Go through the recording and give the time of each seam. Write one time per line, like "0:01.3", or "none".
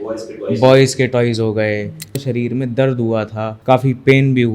0:02.2
0:03.5